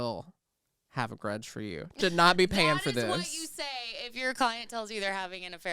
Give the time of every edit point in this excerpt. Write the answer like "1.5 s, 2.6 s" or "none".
2.0 s